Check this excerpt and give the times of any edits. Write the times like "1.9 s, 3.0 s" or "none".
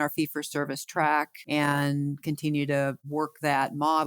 1.4 s